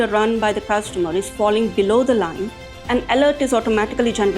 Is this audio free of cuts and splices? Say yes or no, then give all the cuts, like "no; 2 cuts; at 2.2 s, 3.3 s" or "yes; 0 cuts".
yes; 0 cuts